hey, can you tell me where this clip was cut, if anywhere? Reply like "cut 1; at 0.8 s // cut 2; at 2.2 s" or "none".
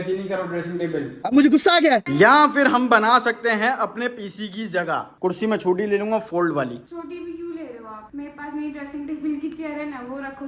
cut 1; at 5.1 s